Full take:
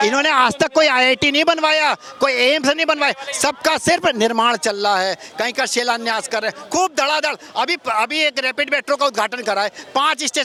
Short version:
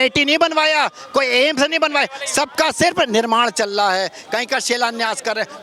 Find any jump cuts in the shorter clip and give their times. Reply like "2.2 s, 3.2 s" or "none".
none